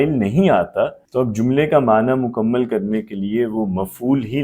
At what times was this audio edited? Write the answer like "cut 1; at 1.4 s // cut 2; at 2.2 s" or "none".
cut 1; at 1.0 s